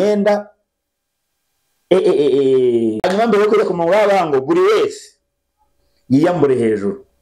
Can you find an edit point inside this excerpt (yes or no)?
yes